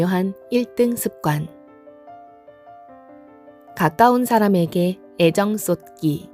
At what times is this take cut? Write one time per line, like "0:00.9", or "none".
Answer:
0:01.5
0:03.2